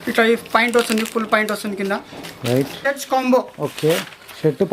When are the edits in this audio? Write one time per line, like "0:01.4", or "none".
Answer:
0:02.8